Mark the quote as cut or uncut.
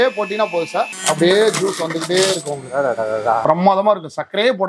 cut